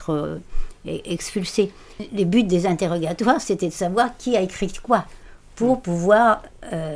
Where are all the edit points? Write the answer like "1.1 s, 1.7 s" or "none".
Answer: 2.0 s